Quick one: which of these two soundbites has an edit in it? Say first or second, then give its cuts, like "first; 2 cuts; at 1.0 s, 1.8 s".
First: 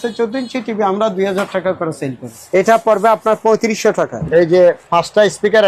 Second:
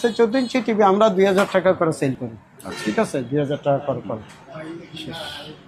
first; 2 cuts; at 2.3 s, 4.2 s